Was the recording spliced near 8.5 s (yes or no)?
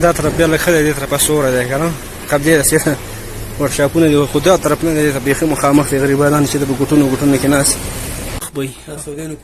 yes